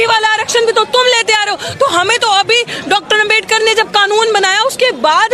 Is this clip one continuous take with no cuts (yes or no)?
yes